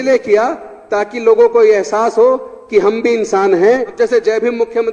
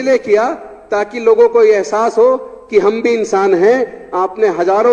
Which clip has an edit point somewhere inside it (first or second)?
first